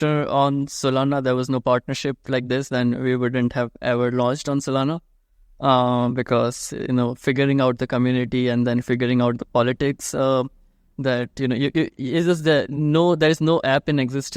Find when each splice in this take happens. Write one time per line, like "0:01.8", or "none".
none